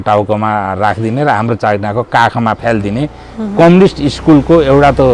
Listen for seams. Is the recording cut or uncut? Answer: uncut